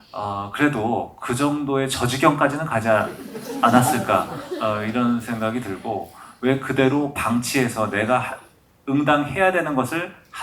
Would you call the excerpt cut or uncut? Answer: uncut